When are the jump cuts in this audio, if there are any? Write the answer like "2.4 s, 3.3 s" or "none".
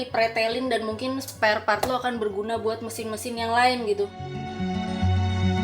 none